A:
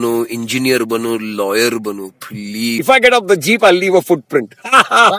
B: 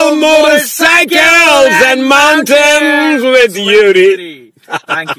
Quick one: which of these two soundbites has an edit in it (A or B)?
A